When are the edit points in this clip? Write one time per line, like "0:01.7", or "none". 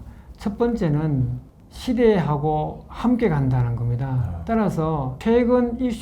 0:01.4
0:05.1